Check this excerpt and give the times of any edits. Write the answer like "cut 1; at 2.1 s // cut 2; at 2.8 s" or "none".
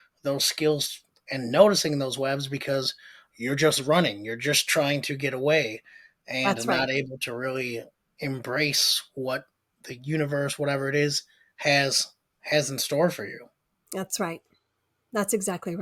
none